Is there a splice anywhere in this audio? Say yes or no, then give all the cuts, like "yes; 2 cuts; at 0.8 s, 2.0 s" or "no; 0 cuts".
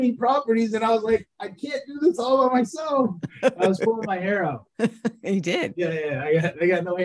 yes; 2 cuts; at 4.7 s, 5.7 s